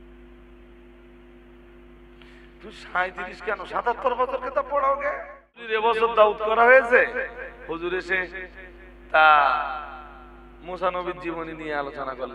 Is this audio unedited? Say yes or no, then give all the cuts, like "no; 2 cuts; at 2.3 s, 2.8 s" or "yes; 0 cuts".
no; 1 cut; at 5.6 s